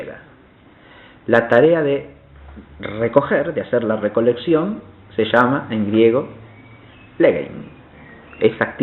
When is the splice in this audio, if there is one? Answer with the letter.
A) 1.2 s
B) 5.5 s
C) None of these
B